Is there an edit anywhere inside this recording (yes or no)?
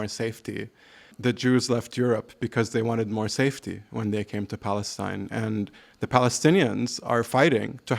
yes